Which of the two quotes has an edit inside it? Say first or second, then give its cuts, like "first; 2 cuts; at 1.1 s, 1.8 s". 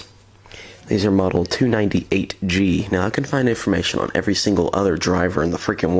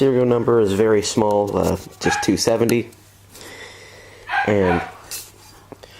second; 1 cut; at 1.1 s